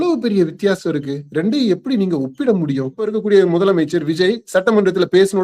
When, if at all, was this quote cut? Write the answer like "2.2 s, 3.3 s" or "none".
3.2 s